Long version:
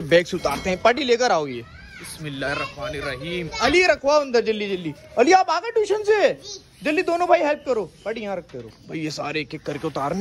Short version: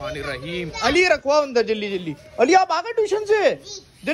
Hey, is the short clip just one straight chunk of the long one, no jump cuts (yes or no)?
yes